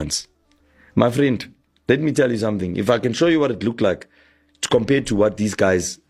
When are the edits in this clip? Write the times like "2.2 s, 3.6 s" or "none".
none